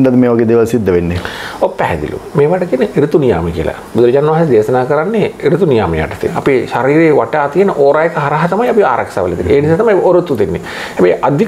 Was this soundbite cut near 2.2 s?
no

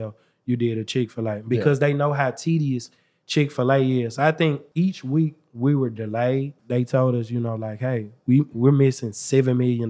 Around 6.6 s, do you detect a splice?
yes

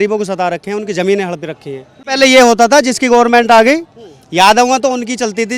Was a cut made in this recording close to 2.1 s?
yes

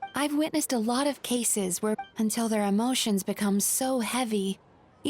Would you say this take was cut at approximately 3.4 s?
no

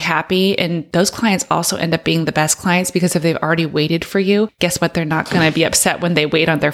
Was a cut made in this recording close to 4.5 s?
yes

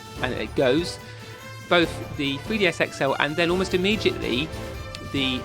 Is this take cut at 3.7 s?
no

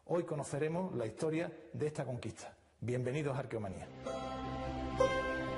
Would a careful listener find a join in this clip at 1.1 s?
no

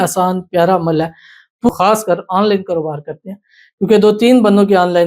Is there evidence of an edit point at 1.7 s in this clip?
yes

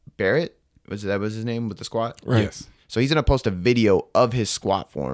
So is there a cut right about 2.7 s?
yes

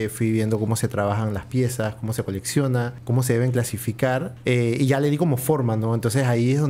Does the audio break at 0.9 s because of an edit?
no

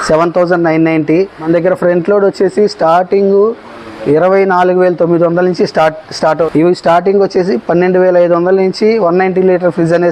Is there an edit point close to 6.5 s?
yes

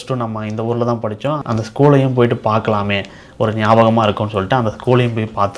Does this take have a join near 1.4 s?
yes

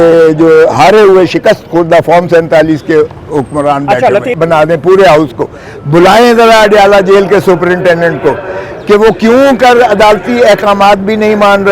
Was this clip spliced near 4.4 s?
yes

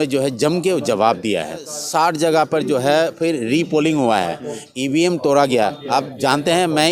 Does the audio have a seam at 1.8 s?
yes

